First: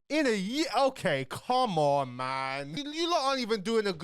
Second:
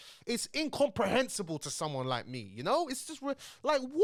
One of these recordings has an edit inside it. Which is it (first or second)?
first